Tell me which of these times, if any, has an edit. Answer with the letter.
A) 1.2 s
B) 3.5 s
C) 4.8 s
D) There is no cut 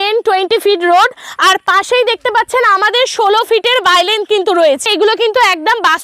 C